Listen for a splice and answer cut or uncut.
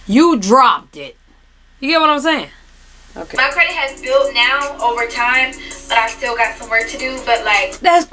cut